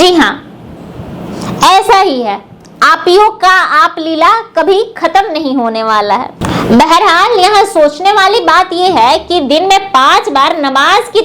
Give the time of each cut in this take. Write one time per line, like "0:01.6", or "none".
0:06.4